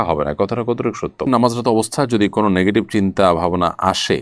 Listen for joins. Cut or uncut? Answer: cut